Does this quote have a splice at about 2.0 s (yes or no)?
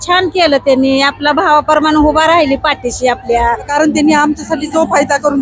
no